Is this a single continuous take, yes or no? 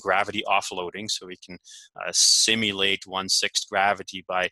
yes